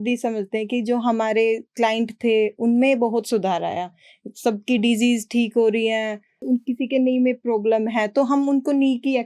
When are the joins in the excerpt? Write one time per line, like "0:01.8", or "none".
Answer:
0:06.5